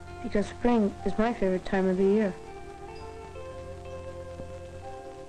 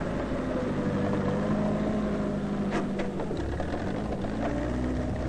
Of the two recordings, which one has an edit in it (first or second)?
first